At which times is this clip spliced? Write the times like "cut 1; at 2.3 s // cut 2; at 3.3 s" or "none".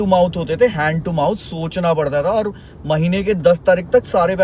none